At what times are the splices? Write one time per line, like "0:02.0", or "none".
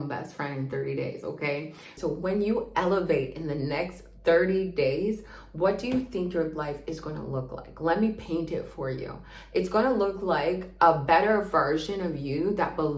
0:01.8